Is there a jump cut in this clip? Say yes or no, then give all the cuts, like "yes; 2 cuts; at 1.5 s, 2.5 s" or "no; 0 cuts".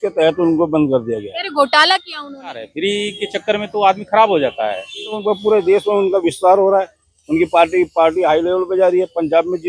yes; 2 cuts; at 2.7 s, 5.2 s